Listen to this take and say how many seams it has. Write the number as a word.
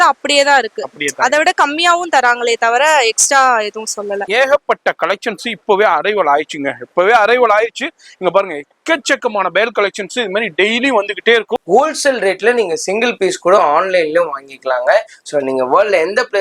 two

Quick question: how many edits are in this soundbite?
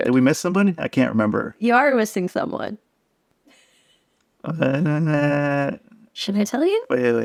zero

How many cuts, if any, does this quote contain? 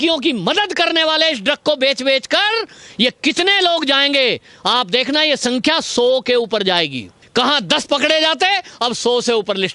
one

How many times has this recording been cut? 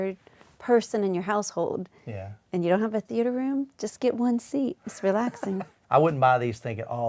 one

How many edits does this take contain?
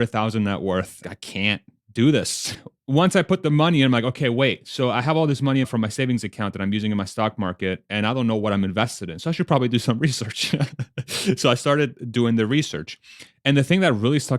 three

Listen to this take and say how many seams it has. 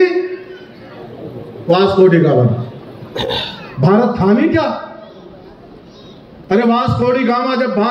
zero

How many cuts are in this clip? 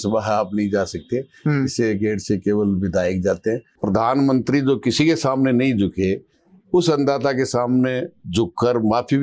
one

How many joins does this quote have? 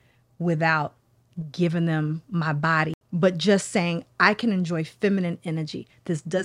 one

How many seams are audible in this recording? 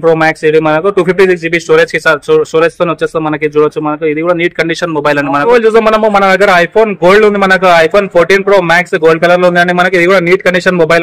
one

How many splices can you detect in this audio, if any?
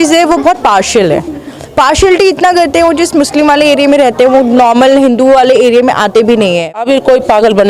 one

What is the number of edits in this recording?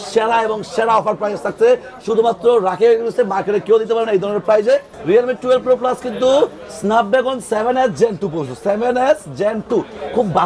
one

